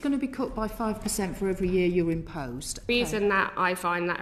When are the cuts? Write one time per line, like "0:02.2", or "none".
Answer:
0:02.9